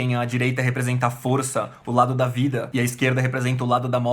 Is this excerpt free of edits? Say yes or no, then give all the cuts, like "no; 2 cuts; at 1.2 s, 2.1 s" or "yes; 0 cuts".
no; 1 cut; at 2.7 s